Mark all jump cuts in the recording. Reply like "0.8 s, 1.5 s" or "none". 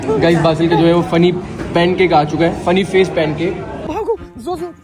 3.8 s